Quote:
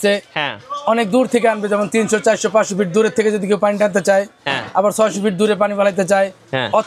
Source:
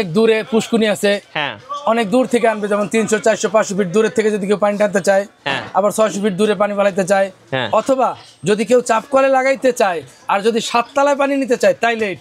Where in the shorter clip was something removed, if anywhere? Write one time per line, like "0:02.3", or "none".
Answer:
none